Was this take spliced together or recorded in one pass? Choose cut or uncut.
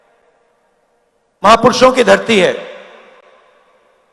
uncut